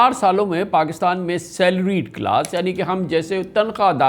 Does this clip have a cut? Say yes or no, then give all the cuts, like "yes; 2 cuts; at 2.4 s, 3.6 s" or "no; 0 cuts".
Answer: no; 0 cuts